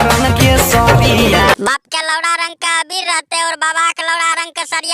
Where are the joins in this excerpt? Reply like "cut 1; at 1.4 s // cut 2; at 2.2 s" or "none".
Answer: cut 1; at 1.6 s